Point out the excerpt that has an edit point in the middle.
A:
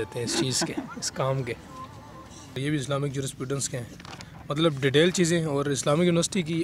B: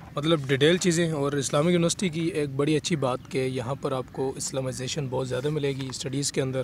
A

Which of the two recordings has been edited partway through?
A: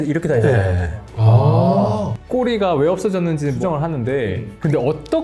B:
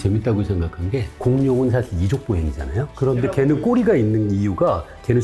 A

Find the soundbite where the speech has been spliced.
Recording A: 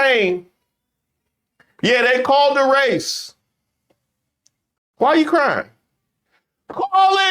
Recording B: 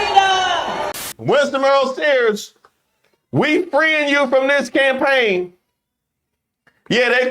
B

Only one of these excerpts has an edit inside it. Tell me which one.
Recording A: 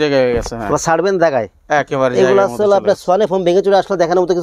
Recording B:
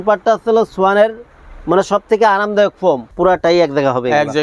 B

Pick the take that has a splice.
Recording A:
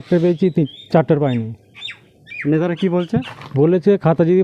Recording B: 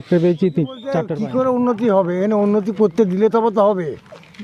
B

